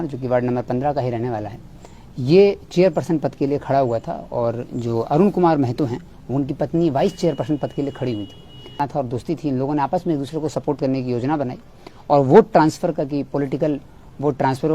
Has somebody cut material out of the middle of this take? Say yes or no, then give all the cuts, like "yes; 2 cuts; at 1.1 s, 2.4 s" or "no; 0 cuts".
yes; 1 cut; at 8.8 s